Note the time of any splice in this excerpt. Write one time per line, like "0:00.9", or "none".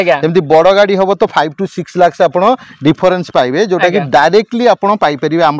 none